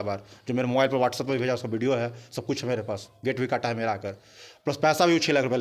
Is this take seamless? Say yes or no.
yes